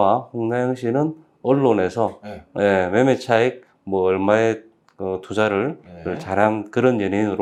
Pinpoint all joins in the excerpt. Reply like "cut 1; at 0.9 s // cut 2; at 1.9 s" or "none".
none